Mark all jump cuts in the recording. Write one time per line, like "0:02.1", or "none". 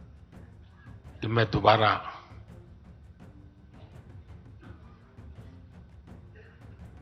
0:01.2
0:02.3